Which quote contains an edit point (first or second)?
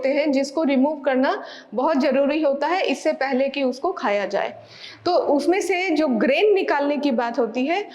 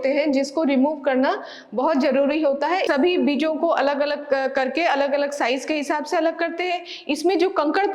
second